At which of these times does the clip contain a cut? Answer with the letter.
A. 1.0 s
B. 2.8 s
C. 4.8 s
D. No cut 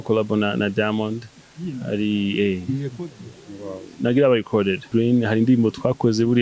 C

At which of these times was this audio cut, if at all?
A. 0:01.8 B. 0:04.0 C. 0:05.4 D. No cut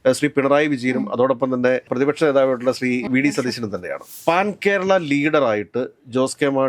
B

